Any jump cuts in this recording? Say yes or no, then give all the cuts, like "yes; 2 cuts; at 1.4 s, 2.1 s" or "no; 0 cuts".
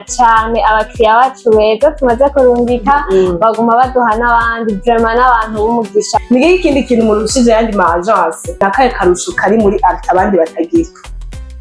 yes; 2 cuts; at 6.2 s, 8.5 s